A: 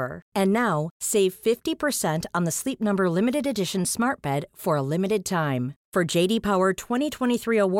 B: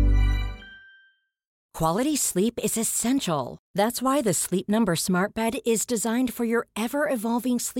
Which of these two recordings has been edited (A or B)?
B